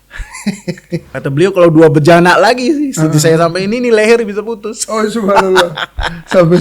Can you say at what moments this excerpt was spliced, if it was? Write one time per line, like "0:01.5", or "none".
0:01.1